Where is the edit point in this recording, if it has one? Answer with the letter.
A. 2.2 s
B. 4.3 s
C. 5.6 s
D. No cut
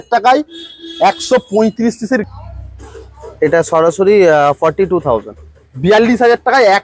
A